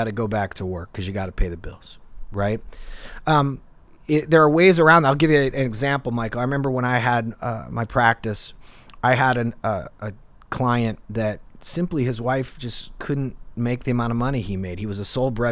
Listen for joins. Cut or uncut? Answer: uncut